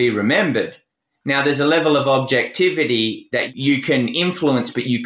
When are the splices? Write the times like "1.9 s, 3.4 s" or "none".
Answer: 3.5 s

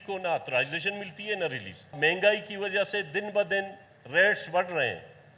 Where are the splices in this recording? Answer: 1.9 s

